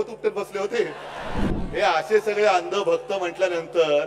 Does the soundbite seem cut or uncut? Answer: cut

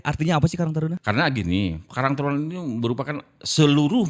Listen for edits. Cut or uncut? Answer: cut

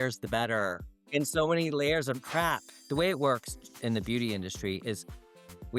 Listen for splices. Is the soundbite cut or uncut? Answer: cut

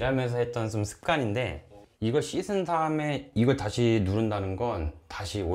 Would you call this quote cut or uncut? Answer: uncut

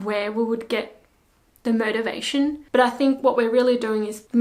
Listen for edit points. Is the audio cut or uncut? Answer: cut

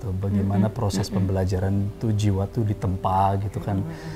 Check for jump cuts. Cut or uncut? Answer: uncut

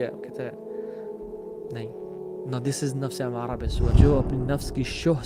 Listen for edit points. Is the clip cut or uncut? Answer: cut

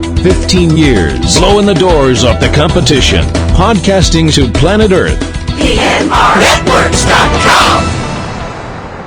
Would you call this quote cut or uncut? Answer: uncut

